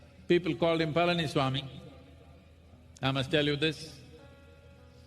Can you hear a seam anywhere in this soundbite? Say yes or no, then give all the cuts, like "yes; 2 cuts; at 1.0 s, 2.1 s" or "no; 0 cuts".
yes; 1 cut; at 0.9 s